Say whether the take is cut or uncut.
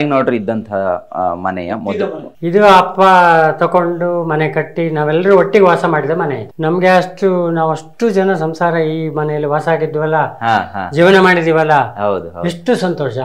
cut